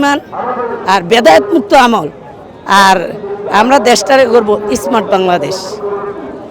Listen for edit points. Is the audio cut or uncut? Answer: uncut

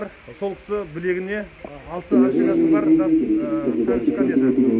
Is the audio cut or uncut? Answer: uncut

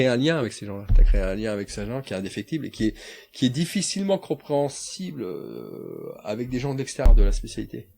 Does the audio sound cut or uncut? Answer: cut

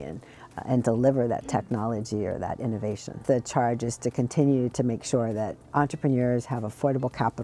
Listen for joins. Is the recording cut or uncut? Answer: cut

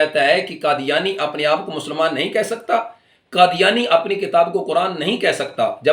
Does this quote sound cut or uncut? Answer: uncut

